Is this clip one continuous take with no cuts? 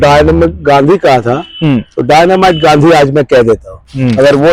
yes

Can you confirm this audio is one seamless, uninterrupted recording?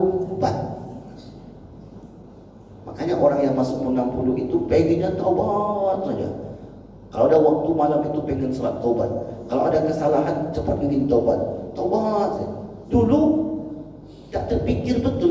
yes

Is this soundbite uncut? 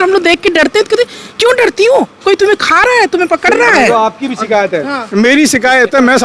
yes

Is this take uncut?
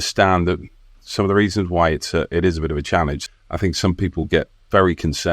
no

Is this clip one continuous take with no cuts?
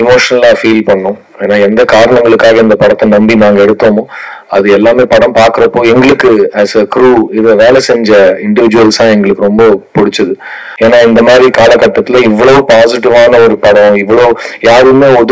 no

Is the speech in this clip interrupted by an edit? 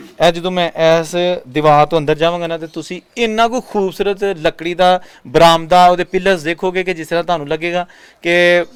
no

